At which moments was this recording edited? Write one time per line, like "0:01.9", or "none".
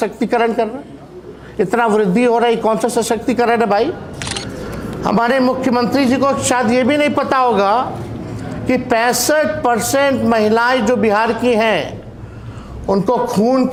none